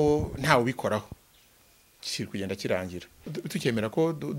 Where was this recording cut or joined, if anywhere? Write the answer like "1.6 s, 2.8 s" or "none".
3.4 s